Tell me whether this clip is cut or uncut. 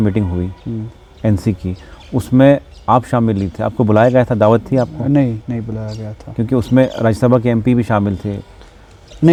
uncut